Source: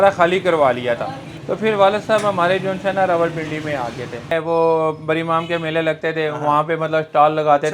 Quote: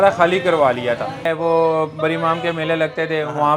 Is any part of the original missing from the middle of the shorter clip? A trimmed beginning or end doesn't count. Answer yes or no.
yes